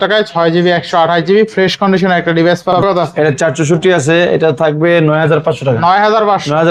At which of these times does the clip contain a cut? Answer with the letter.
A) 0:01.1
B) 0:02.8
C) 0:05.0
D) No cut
B